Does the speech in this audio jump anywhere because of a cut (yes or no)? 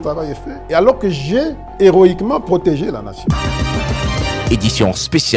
yes